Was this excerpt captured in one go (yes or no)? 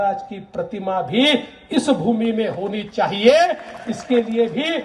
yes